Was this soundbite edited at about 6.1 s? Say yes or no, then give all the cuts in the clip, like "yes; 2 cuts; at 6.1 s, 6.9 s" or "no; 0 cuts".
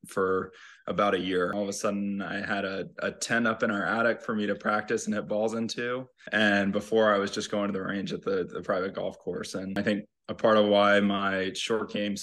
yes; 3 cuts; at 1.5 s, 6.1 s, 9.8 s